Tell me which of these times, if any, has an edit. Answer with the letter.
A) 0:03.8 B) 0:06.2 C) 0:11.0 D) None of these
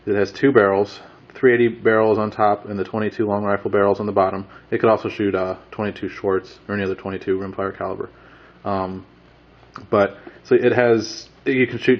B